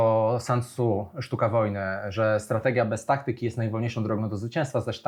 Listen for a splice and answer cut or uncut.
uncut